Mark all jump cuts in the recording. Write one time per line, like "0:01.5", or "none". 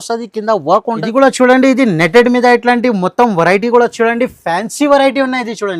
0:01.0